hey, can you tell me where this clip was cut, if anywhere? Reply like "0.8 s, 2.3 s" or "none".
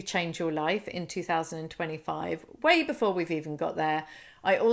none